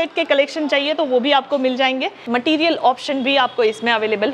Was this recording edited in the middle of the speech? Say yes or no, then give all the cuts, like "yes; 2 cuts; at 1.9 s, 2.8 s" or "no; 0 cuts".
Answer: yes; 1 cut; at 2.2 s